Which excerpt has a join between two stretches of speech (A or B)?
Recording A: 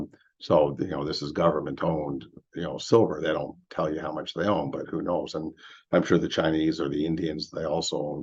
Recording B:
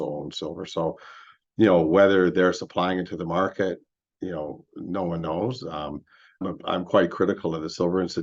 B